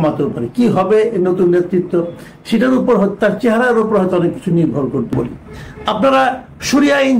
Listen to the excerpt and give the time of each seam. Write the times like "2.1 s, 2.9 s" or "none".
5.2 s